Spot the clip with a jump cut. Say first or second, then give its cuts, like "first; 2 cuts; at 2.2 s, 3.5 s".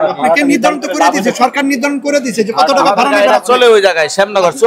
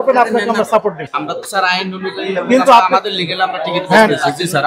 second; 1 cut; at 1.0 s